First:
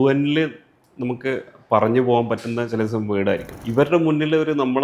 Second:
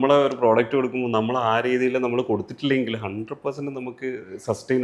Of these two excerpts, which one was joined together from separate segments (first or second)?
first